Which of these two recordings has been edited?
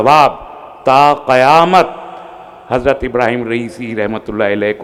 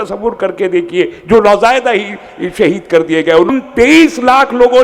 second; 1 cut; at 3.5 s

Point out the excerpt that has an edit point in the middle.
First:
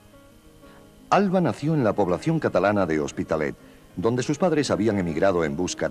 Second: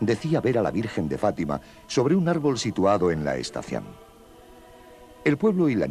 second; 1 cut; at 3.5 s

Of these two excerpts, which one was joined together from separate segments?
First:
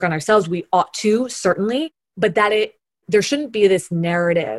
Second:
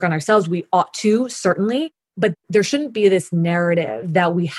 second; 1 cut; at 2.3 s

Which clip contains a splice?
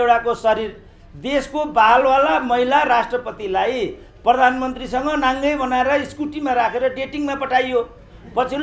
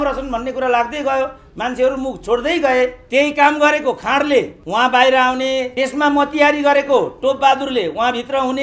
second; 3 cuts; at 3.0 s, 4.6 s, 5.7 s

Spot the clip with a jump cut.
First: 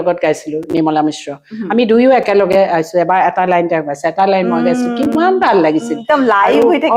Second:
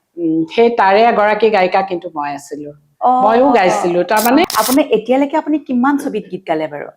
second; 1 cut; at 4.5 s

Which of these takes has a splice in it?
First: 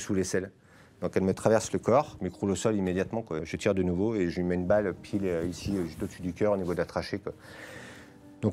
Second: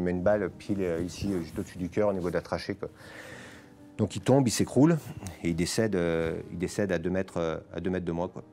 first; 2 cuts; at 2.1 s, 3.4 s

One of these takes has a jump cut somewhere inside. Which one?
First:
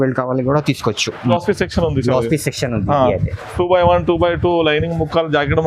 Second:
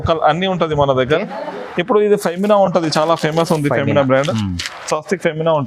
first; 1 cut; at 1.3 s

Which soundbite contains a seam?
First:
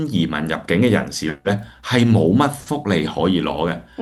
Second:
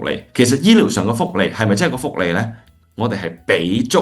second; 1 cut; at 2.7 s

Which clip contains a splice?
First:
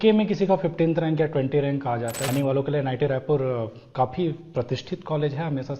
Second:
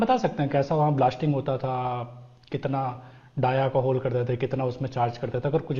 first; 1 cut; at 2.3 s

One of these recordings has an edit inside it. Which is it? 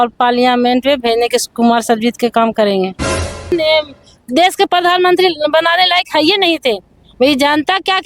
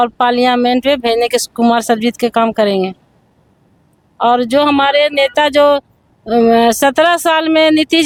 first; 1 cut; at 3.5 s

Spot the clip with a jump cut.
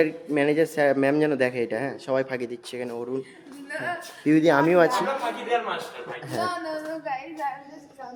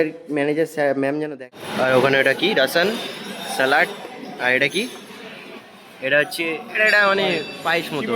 second; 1 cut; at 1.7 s

